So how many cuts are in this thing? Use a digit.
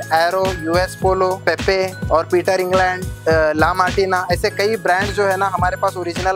2